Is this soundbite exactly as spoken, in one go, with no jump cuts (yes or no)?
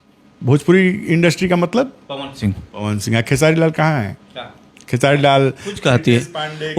yes